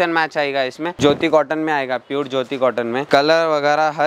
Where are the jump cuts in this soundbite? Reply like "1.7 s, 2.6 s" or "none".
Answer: 0.9 s, 3.0 s